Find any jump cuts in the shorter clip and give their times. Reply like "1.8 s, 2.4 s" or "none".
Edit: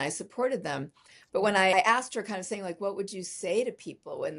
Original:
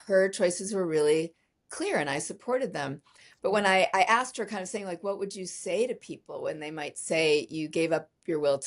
1.7 s